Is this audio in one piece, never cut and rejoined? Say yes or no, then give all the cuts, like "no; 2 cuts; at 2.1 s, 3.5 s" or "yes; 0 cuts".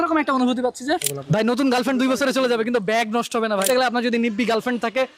no; 2 cuts; at 1.1 s, 3.7 s